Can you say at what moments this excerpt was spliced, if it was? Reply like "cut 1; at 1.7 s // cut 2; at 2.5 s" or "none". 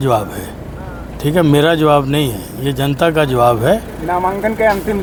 none